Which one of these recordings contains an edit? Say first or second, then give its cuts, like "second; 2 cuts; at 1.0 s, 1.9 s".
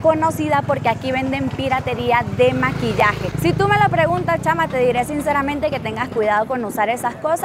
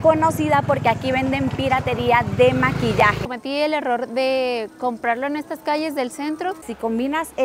second; 2 cuts; at 3.3 s, 6.6 s